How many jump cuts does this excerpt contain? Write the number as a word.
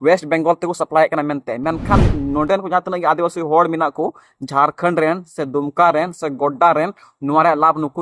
zero